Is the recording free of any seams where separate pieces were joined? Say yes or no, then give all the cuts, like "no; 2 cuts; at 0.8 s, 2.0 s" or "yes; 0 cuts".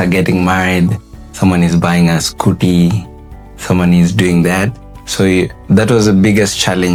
yes; 0 cuts